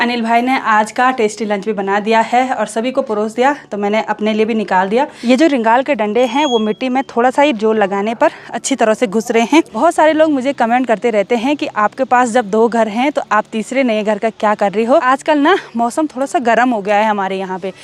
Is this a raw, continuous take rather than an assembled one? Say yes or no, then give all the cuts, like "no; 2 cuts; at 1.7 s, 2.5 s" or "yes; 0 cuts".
no; 3 cuts; at 5.2 s, 9.7 s, 15.0 s